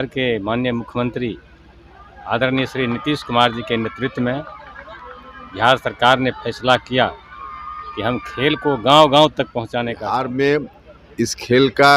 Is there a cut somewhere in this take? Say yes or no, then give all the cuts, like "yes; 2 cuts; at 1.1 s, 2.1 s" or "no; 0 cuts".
yes; 1 cut; at 10.0 s